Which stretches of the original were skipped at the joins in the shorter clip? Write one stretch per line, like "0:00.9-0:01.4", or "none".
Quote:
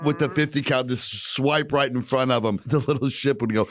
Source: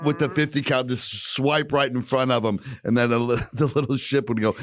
0:02.6-0:03.5